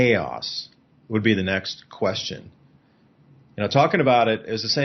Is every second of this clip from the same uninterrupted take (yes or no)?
yes